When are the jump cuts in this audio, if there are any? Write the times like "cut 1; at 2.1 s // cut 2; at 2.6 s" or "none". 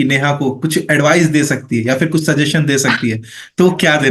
none